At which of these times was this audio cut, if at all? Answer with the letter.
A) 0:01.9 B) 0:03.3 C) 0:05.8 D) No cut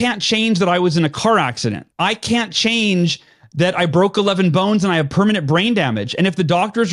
A